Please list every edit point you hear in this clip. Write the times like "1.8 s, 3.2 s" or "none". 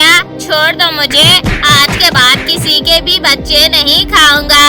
none